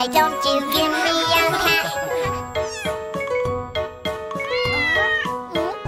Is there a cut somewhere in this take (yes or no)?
no